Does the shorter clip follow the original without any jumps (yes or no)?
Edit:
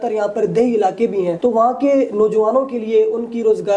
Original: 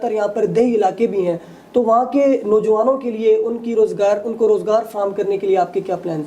no